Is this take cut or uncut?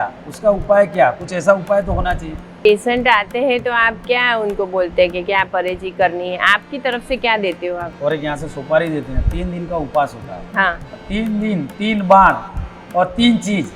cut